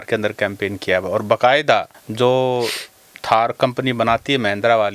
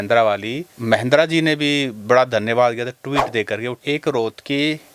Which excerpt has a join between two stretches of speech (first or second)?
second